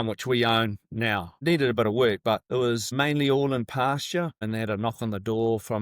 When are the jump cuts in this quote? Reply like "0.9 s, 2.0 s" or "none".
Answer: 1.3 s, 2.7 s, 4.4 s